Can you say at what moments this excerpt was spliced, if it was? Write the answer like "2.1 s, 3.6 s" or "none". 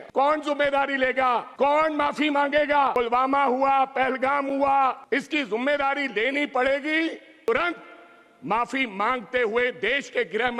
1.5 s, 2.9 s, 5.0 s, 7.5 s

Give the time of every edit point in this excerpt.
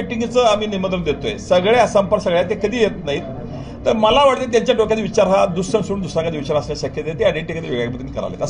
none

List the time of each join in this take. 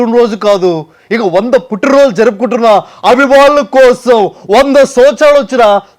none

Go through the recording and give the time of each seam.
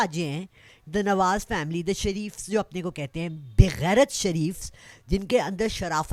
none

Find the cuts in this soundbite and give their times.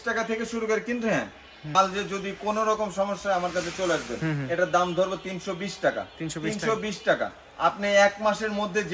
1.8 s

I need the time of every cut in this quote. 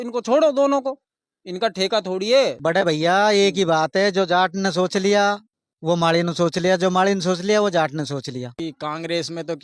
2.6 s, 8.6 s

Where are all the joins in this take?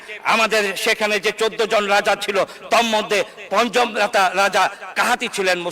none

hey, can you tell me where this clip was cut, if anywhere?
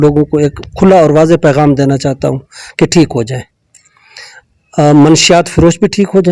none

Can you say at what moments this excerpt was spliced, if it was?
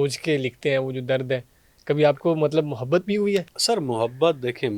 3.5 s

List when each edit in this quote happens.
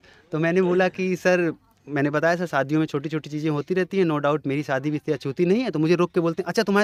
none

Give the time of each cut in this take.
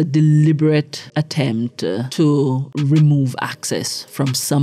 1.0 s, 2.1 s, 2.7 s

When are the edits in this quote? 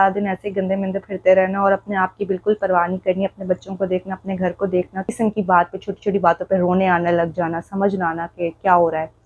5.1 s

